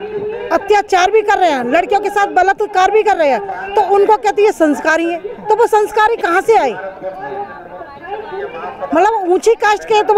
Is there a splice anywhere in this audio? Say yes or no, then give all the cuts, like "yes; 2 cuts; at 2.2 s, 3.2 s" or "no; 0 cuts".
no; 0 cuts